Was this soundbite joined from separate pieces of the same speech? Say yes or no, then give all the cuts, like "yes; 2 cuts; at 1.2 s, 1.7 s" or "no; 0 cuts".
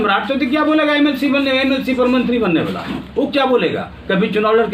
no; 0 cuts